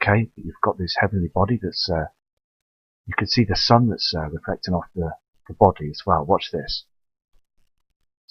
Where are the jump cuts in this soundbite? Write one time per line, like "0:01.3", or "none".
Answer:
0:03.3